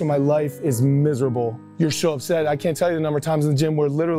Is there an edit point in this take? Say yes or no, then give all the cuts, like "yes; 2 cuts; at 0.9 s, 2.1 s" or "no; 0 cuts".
yes; 1 cut; at 1.6 s